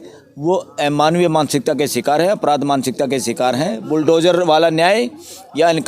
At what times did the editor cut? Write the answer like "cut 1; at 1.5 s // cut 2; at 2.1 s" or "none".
cut 1; at 3.8 s